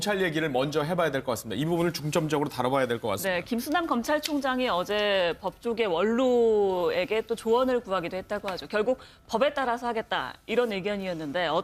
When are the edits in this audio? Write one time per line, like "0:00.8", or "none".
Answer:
0:10.7